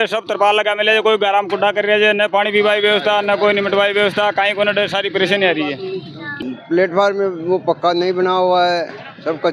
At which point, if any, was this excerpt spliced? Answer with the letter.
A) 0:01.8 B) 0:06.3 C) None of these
B